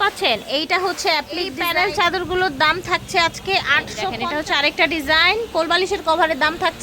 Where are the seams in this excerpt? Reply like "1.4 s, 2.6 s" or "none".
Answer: 1.6 s, 4.2 s